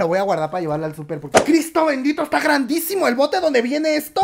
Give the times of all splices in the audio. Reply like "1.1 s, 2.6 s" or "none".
1.4 s